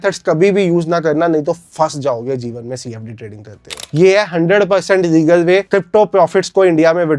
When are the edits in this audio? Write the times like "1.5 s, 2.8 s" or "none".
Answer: 3.7 s